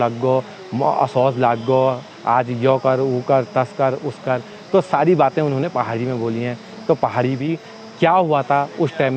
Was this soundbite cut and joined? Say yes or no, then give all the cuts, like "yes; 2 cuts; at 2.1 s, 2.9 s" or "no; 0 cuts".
yes; 1 cut; at 7.4 s